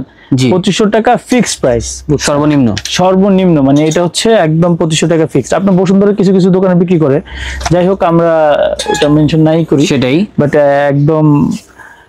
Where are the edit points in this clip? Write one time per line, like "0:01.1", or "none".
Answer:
none